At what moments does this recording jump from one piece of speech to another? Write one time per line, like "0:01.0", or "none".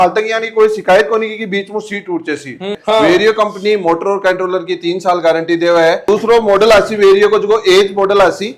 0:02.8
0:06.1